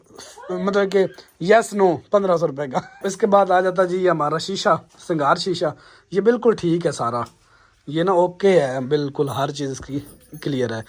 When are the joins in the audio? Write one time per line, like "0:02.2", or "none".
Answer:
0:02.9